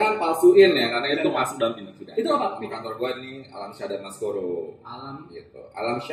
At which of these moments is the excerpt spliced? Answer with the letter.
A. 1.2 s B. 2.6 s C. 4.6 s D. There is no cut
B